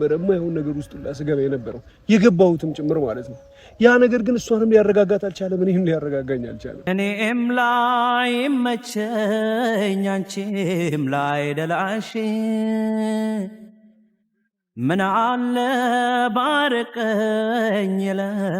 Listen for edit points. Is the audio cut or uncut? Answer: uncut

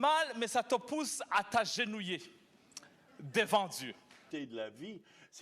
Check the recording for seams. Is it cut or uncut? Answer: cut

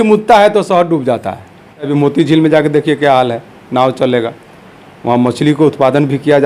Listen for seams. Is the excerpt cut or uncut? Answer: cut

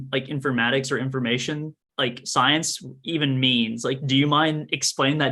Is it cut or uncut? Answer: uncut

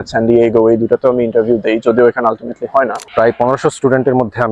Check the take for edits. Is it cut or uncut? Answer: cut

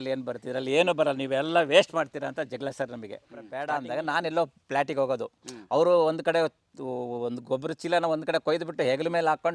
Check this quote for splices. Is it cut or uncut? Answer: cut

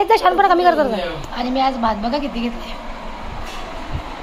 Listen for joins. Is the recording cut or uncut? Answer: cut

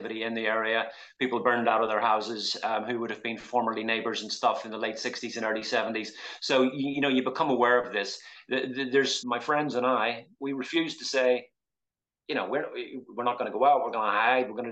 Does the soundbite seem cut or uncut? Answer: cut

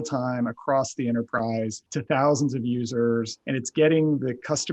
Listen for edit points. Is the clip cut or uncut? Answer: cut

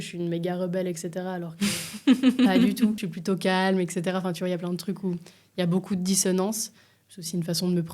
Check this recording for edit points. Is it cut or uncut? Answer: cut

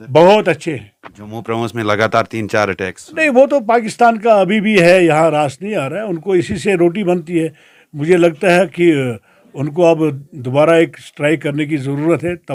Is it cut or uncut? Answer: uncut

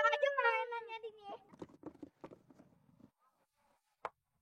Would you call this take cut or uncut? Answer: cut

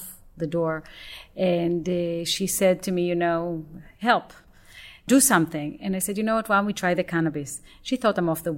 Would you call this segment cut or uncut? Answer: cut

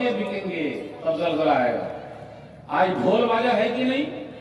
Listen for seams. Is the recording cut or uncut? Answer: uncut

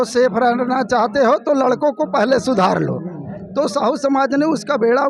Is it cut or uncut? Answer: uncut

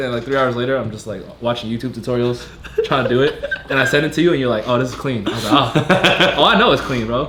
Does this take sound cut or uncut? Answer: uncut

